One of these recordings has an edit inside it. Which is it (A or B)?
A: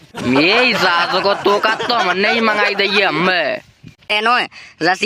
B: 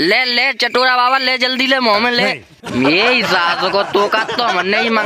A